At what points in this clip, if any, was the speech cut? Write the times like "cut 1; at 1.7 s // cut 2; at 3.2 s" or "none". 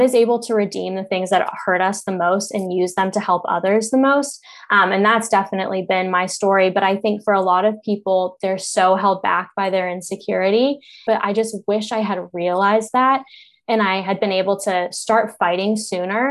cut 1; at 11.0 s